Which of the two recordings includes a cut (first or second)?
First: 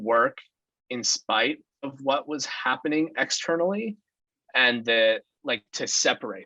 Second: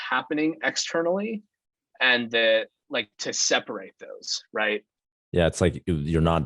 second